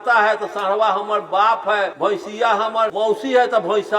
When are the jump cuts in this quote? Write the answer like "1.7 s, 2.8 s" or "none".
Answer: 1.9 s, 2.9 s